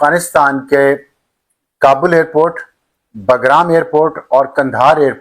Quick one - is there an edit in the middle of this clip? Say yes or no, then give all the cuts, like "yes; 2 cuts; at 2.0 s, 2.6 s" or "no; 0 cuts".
no; 0 cuts